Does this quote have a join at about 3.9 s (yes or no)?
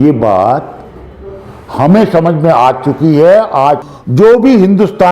yes